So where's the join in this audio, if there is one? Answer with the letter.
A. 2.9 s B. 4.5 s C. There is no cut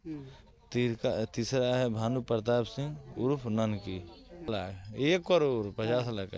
B